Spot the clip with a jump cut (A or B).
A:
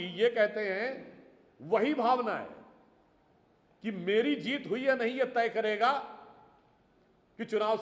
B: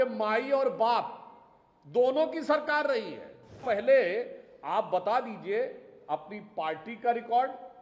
B